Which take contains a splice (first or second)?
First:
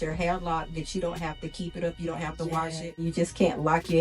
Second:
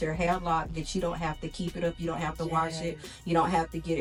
first